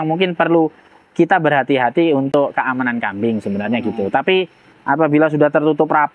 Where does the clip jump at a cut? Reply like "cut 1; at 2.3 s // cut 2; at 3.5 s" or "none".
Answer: none